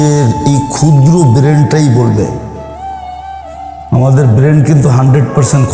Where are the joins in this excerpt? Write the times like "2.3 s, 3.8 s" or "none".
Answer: none